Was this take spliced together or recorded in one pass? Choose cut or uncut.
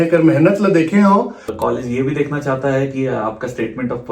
cut